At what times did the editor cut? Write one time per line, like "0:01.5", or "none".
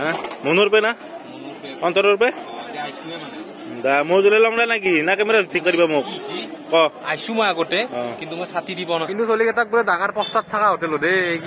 0:09.1